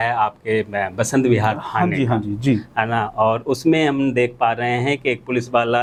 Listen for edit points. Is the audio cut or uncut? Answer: uncut